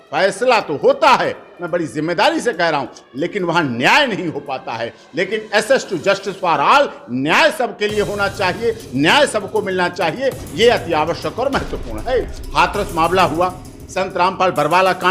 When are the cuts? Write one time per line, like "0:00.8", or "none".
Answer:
0:12.4